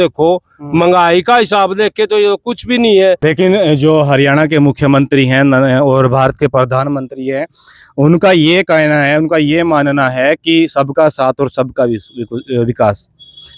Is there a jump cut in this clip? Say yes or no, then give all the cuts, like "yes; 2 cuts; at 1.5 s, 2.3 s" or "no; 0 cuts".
yes; 1 cut; at 3.2 s